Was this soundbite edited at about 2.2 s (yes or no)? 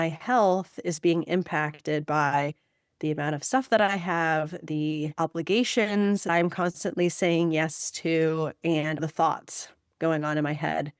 no